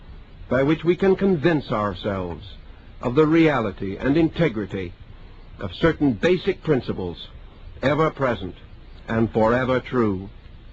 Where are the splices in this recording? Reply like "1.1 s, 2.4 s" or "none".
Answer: 9.4 s